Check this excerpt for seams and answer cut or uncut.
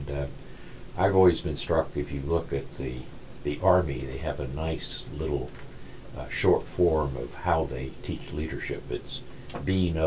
uncut